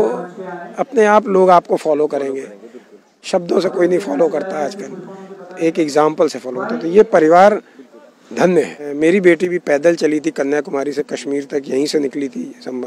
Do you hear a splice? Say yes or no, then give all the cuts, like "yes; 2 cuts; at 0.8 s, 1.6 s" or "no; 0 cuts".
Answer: yes; 1 cut; at 8.8 s